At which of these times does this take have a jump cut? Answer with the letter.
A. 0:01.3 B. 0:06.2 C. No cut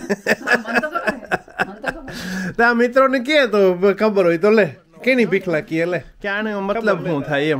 B